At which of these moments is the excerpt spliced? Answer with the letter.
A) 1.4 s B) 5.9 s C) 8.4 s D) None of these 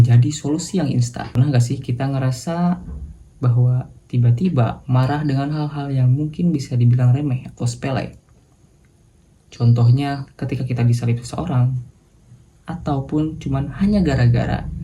A